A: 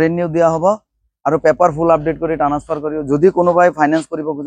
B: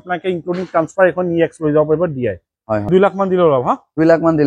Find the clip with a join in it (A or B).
B